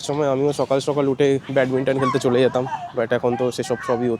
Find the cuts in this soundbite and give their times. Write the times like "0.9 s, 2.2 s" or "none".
none